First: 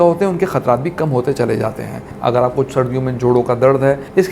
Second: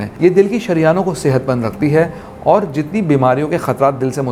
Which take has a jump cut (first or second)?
first